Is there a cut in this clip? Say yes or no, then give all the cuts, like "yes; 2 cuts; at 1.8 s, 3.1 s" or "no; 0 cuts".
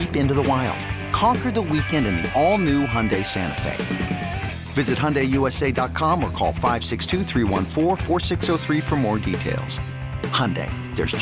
no; 0 cuts